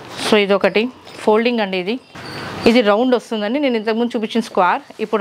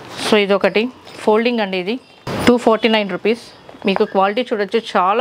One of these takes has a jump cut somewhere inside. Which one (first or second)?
first